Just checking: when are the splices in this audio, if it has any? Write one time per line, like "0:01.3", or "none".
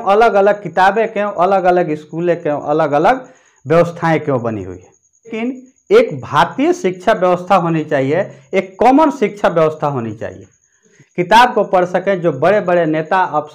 0:05.3
0:10.9